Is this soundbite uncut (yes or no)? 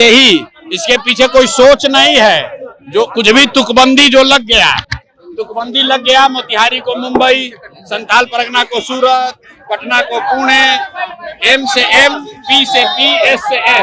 yes